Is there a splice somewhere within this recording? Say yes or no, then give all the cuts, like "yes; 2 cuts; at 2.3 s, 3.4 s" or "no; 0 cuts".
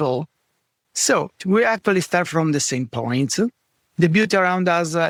no; 0 cuts